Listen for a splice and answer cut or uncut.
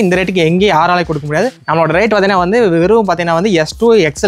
uncut